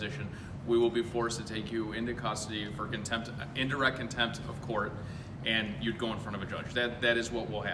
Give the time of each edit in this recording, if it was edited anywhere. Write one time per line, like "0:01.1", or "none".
none